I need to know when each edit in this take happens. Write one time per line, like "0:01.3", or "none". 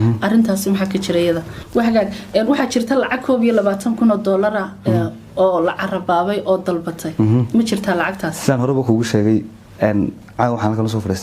0:01.5